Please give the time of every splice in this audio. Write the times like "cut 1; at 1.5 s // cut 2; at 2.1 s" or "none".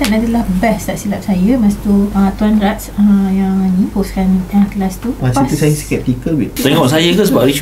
cut 1; at 2.1 s // cut 2; at 3.9 s // cut 3; at 5.2 s // cut 4; at 6.5 s